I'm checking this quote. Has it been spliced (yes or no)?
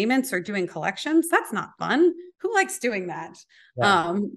yes